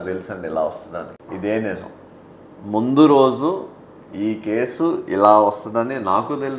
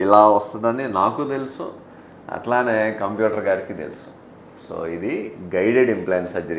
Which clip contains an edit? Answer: first; 1 cut; at 1.2 s

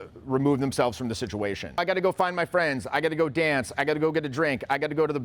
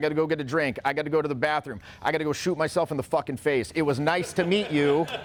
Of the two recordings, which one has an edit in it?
first; 1 cut; at 1.8 s

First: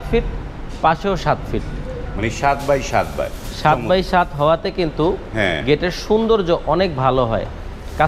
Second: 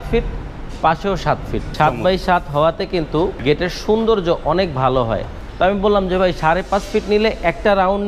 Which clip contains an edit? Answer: second; 3 cuts; at 1.6 s, 3.4 s, 5.4 s

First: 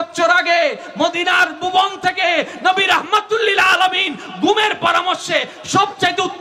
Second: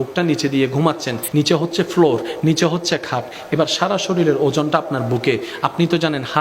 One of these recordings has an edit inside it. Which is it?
second; 1 cut; at 1.2 s

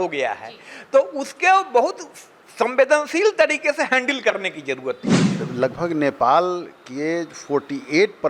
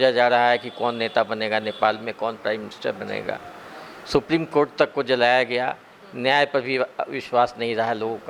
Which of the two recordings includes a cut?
first; 1 cut; at 5.4 s

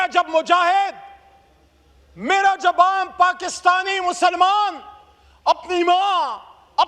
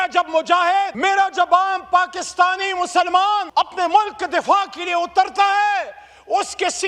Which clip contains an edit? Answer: second; 2 cuts; at 0.9 s, 3.5 s

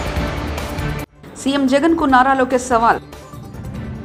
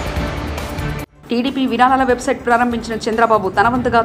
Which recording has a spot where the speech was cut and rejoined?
second; 1 cut; at 1.1 s

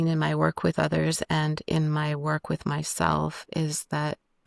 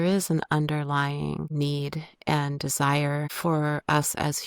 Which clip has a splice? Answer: second; 2 cuts; at 1.5 s, 3.3 s

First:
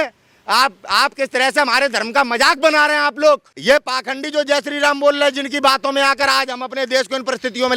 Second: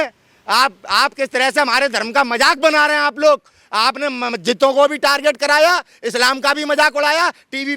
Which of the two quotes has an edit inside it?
first; 1 cut; at 3.5 s

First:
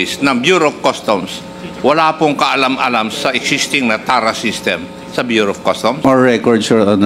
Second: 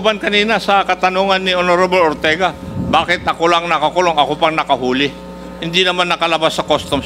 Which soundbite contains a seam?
first; 1 cut; at 6.0 s

